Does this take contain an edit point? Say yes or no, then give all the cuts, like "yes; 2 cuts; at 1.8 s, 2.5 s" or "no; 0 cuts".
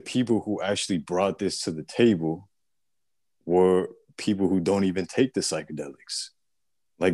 no; 0 cuts